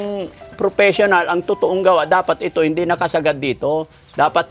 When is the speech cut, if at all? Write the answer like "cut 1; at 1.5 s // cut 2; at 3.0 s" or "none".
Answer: none